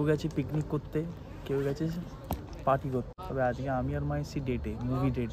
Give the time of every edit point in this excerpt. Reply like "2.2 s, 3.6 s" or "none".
3.2 s